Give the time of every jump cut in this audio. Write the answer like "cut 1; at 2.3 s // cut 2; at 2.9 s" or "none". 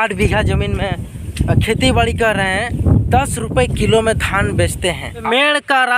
cut 1; at 2.8 s // cut 2; at 5.2 s